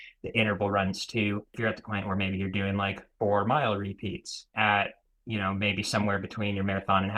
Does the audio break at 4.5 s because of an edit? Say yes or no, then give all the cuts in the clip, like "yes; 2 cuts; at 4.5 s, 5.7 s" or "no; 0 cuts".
yes; 2 cuts; at 1.5 s, 4.5 s